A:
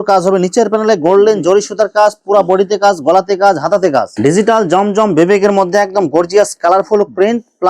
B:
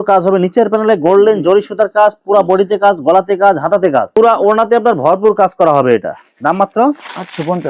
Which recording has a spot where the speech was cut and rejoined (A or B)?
A